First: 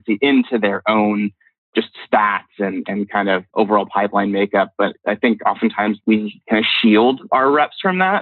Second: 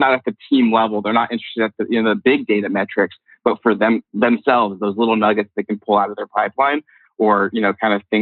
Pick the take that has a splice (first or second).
first